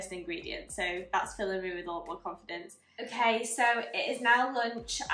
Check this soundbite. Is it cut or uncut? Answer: cut